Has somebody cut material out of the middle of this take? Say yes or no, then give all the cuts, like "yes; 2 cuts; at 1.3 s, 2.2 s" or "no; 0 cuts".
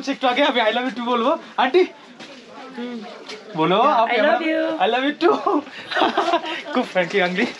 no; 0 cuts